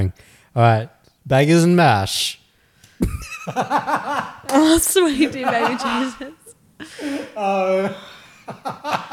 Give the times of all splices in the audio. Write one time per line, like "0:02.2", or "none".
none